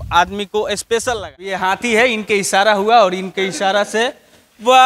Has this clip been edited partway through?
yes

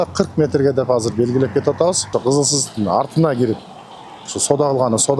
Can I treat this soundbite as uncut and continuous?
yes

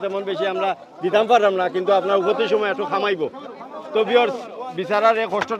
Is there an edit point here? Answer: no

